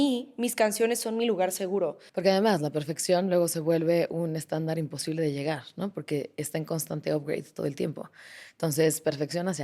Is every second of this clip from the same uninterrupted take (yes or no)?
no